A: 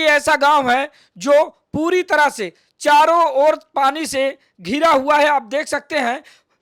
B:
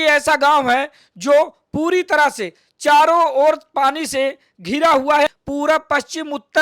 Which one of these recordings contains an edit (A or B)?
B